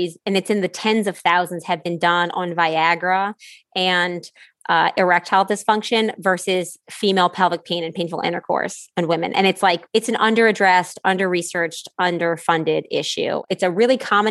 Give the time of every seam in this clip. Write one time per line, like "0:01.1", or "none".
0:09.8
0:13.4